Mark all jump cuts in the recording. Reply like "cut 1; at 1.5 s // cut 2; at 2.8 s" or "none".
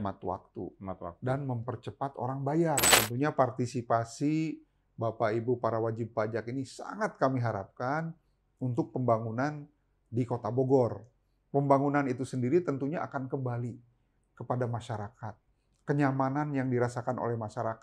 cut 1; at 2.9 s